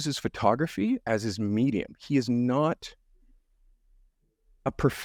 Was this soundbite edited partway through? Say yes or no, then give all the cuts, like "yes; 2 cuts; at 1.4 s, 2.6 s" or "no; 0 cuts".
no; 0 cuts